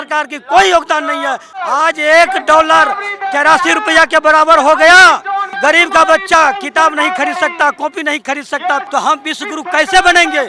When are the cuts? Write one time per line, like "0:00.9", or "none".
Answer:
0:01.6
0:05.5
0:08.9